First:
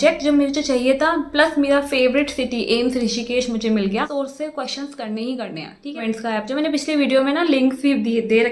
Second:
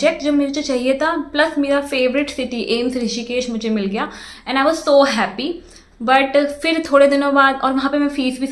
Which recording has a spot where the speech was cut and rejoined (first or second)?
first